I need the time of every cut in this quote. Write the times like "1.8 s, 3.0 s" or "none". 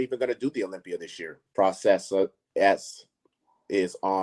1.5 s

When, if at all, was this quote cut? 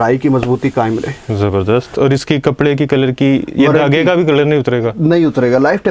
1.9 s

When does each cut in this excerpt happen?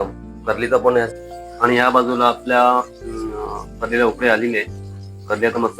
1.1 s

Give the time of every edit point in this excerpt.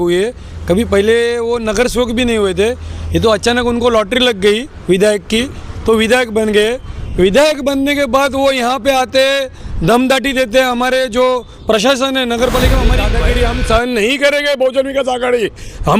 13.1 s

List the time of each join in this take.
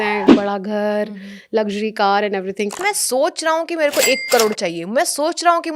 2.8 s

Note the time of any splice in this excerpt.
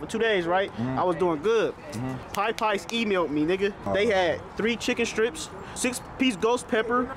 2.3 s, 3.8 s

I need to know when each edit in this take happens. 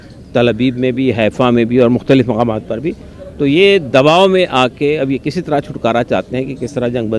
none

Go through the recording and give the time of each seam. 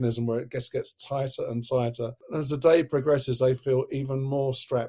2.2 s

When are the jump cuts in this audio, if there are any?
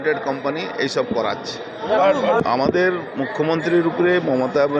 2.4 s

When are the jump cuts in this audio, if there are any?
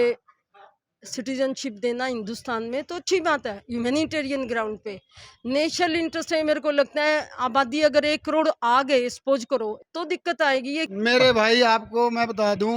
9.8 s, 10.8 s

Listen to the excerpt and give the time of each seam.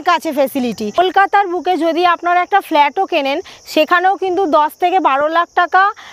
0.9 s

